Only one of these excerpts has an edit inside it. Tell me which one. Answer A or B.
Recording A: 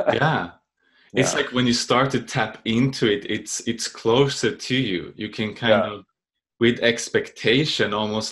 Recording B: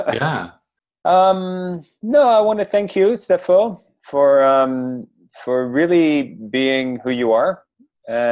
B